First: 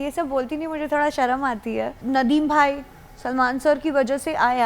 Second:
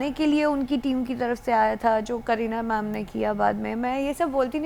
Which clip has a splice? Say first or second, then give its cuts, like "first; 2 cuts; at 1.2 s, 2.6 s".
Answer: first; 1 cut; at 2.0 s